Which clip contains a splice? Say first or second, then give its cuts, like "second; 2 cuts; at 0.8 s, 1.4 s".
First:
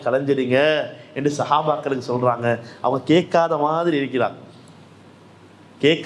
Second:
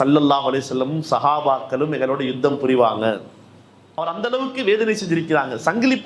second; 1 cut; at 4.0 s